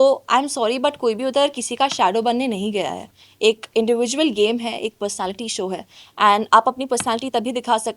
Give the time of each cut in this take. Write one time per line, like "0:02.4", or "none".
none